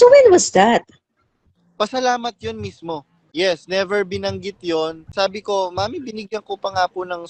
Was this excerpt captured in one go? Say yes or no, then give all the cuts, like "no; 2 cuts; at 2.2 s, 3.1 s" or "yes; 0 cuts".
no; 1 cut; at 3.2 s